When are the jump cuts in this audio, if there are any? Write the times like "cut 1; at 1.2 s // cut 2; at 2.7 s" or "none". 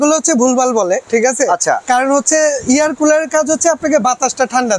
cut 1; at 1.0 s